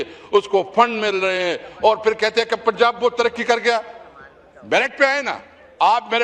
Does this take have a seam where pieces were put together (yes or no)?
no